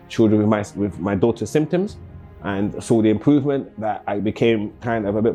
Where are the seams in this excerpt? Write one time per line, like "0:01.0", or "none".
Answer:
none